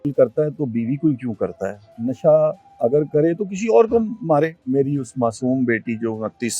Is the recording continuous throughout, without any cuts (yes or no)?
no